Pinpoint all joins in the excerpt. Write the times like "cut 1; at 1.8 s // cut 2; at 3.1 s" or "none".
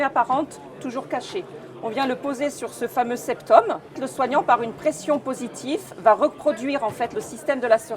cut 1; at 4.1 s